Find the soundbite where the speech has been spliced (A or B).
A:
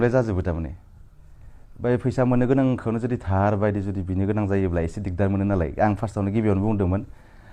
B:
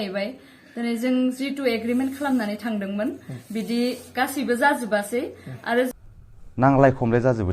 B